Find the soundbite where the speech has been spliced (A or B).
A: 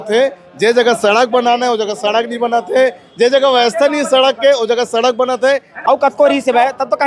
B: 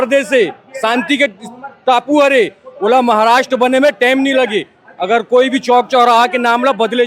A